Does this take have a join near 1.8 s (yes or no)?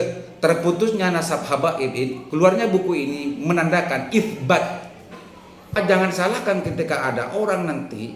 no